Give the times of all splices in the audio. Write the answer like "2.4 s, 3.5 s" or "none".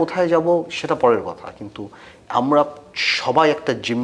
none